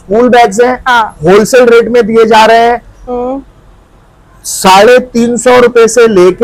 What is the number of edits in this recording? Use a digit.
0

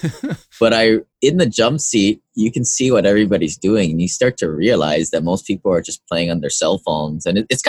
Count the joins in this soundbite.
0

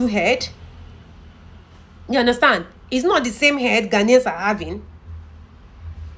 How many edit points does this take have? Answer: 0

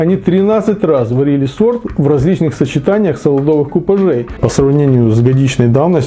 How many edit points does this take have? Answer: 1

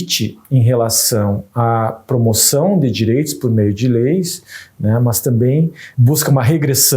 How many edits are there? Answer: 1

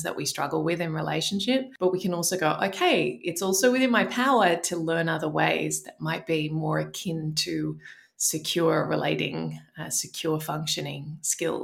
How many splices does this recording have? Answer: 1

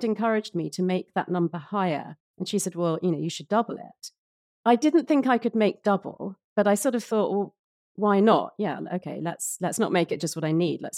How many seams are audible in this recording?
1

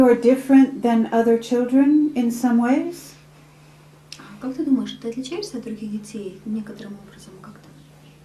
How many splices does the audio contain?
1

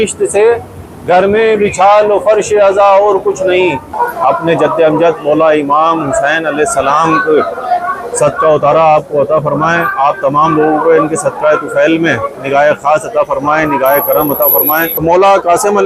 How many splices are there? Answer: 2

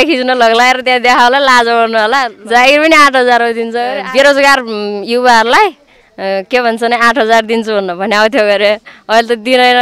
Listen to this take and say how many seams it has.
2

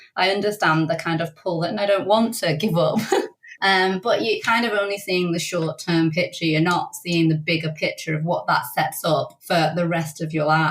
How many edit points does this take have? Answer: 2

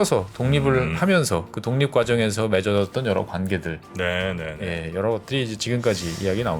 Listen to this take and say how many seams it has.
1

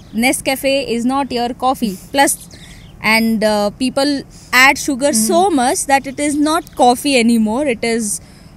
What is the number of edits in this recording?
0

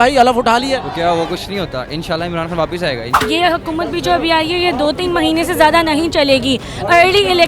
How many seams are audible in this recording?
1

